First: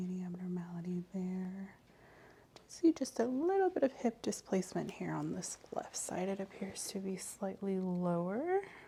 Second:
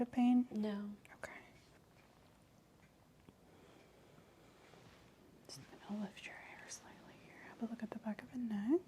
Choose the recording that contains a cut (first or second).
second